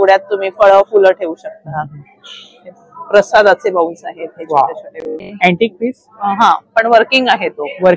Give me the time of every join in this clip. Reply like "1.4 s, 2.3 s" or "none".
5.2 s